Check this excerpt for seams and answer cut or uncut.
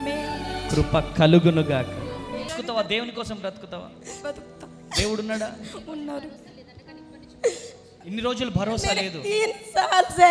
cut